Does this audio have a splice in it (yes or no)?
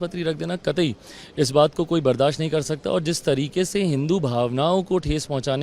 no